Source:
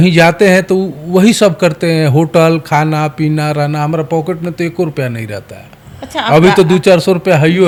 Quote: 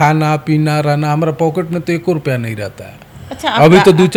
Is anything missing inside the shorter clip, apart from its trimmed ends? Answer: no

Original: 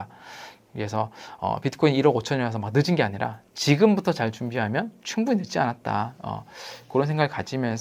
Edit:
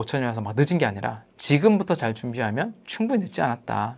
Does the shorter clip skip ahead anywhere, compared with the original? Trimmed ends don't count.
no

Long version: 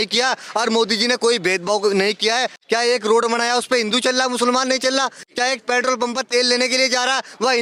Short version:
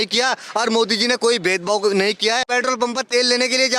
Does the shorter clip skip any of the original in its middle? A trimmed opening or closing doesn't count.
yes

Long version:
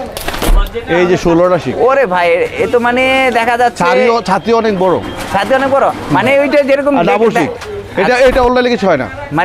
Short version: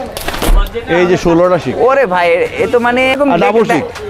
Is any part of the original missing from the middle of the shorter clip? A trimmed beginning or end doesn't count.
yes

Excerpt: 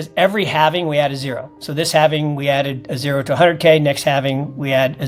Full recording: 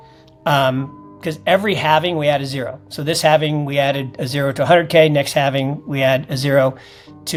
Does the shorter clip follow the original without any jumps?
yes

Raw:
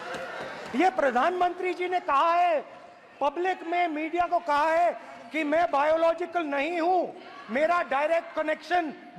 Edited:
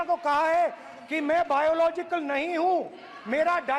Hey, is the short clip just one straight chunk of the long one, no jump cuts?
yes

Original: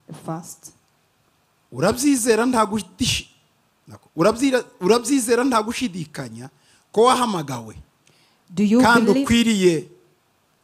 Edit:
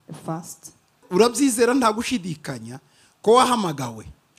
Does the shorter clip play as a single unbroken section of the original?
no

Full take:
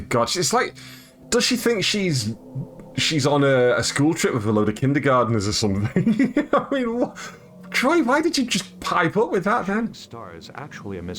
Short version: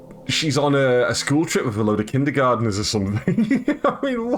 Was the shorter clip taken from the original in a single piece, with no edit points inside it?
yes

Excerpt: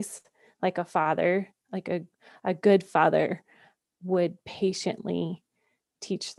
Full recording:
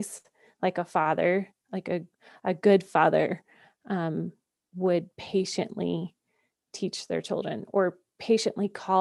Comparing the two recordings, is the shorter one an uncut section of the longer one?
no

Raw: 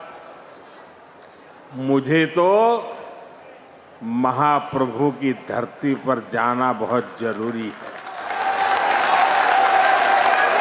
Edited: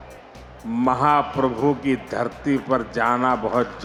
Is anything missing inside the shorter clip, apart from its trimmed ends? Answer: no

